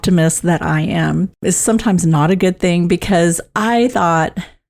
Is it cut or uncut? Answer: cut